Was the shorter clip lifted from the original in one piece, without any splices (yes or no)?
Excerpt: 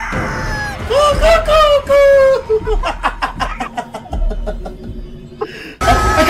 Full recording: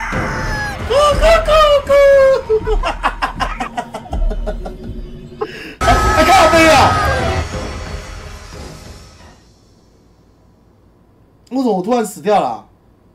yes